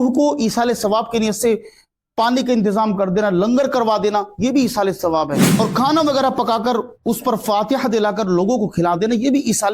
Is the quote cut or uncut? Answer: cut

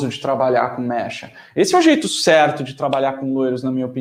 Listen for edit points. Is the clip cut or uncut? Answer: uncut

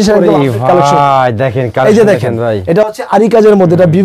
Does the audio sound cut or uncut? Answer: uncut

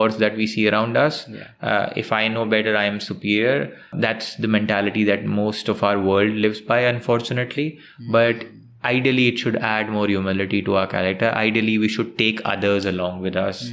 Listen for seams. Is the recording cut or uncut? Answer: cut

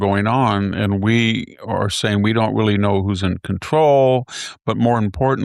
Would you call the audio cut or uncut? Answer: uncut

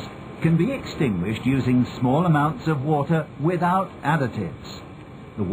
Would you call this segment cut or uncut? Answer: uncut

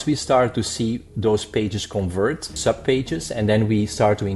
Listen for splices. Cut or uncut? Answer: cut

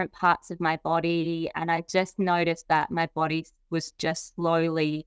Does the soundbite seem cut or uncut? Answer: uncut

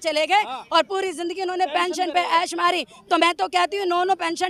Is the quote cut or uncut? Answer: uncut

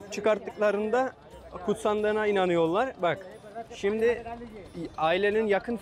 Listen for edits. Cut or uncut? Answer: uncut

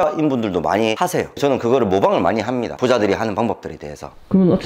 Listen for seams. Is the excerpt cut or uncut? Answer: uncut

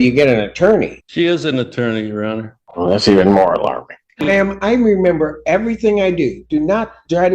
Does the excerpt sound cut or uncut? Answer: cut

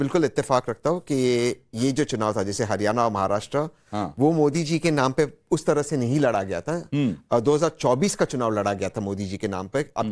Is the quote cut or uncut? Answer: cut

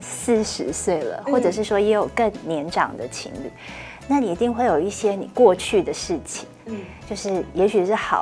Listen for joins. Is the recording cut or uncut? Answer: uncut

